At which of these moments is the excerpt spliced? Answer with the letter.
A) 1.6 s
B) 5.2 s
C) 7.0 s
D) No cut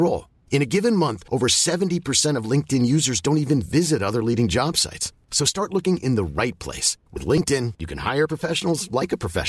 D